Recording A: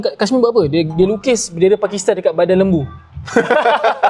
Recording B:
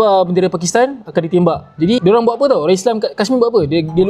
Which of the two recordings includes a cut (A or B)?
B